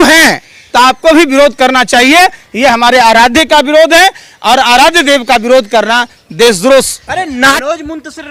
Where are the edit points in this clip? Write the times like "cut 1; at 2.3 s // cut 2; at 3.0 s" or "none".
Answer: none